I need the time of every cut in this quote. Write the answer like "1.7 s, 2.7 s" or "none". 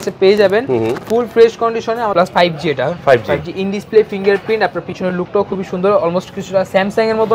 2.1 s